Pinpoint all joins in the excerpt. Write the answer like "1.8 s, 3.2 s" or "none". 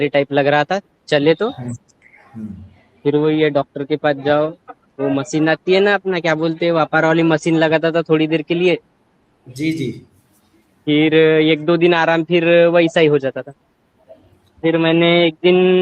14.6 s